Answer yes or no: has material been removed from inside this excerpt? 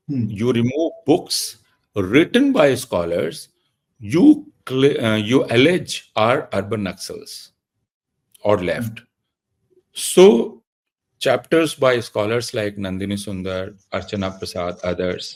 no